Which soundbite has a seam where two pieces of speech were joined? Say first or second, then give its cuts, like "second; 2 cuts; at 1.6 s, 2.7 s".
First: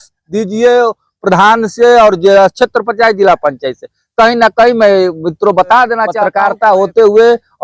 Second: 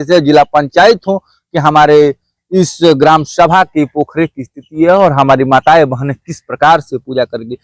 first; 1 cut; at 6.2 s